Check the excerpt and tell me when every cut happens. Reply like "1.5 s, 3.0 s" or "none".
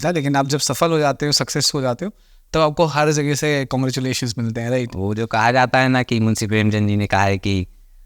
none